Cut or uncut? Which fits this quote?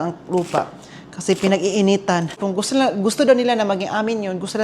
cut